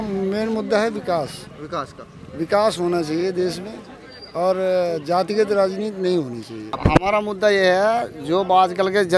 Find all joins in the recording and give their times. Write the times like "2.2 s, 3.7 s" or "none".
6.8 s